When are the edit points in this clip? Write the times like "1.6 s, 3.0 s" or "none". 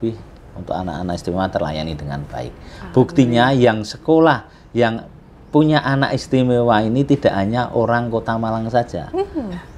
none